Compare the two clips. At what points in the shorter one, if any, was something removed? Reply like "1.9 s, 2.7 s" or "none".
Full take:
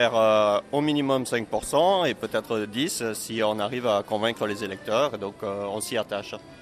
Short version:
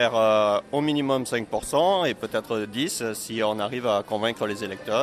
none